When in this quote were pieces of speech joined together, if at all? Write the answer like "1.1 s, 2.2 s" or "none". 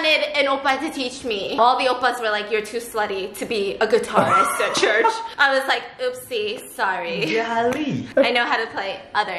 1.6 s, 5.3 s